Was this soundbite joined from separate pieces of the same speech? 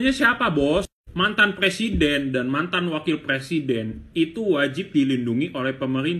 no; 0 cuts

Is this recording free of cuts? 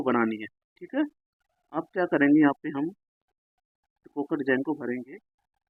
yes; 0 cuts

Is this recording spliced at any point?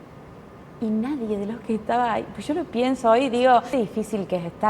yes; 1 cut; at 3.7 s

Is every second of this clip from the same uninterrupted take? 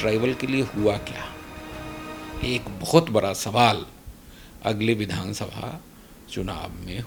yes; 0 cuts

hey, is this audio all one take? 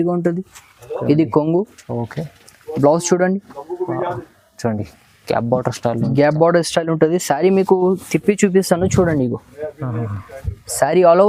yes; 0 cuts

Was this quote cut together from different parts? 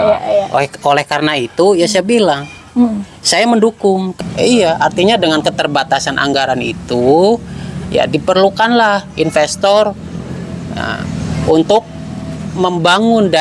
yes; 1 cut; at 4.1 s

